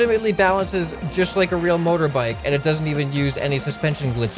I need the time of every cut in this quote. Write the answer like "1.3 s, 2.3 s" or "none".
none